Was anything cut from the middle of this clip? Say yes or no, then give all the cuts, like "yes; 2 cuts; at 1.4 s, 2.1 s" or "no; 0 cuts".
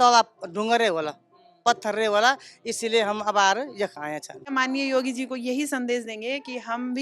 yes; 1 cut; at 4.5 s